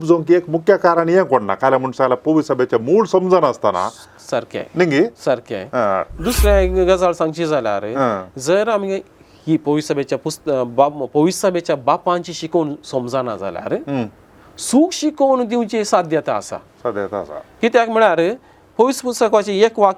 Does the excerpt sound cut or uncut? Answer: uncut